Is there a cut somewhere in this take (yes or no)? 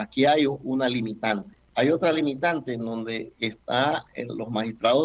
yes